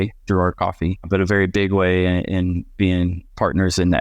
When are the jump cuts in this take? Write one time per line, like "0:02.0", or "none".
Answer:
0:01.1